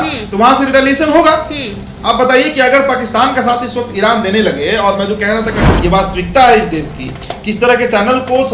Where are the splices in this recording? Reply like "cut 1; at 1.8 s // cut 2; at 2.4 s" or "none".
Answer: cut 1; at 5.7 s